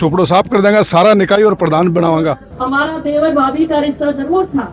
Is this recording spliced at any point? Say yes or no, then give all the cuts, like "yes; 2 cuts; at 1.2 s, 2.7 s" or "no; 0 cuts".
yes; 1 cut; at 2.5 s